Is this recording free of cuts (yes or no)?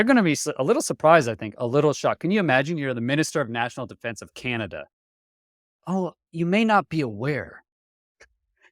yes